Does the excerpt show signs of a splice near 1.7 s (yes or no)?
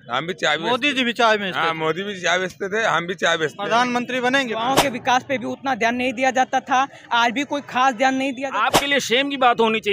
no